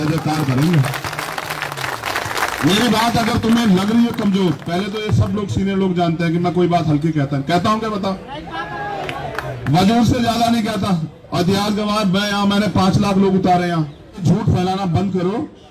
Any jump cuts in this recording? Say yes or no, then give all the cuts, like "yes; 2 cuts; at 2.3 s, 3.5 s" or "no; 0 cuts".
yes; 1 cut; at 14.2 s